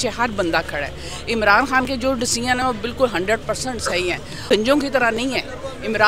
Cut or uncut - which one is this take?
cut